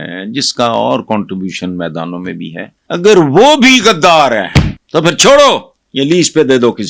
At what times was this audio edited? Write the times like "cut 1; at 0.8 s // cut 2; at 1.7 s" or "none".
cut 1; at 2.7 s // cut 2; at 4.8 s // cut 3; at 5.8 s